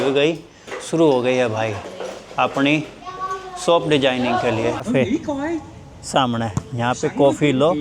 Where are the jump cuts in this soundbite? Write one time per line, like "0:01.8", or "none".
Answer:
0:04.8